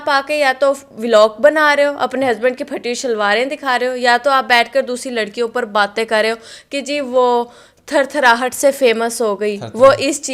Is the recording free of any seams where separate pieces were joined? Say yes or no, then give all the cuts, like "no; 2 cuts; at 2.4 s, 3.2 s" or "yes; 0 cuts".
yes; 0 cuts